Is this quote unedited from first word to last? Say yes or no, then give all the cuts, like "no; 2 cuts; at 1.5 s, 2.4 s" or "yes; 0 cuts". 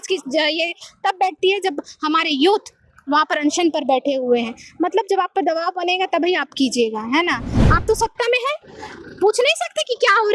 no; 1 cut; at 7.5 s